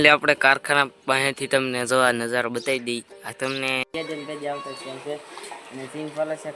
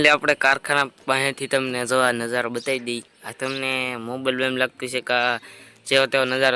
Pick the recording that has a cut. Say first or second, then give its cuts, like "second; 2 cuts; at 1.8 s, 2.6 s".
first; 1 cut; at 3.9 s